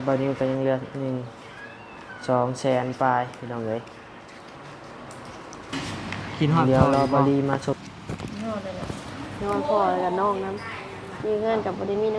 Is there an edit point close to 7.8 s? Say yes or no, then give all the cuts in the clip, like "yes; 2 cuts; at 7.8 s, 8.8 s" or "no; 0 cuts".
yes; 1 cut; at 7.8 s